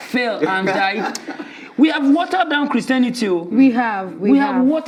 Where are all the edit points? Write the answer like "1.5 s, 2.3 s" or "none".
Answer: none